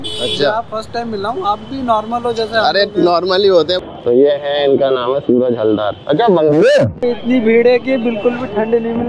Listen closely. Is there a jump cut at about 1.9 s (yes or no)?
no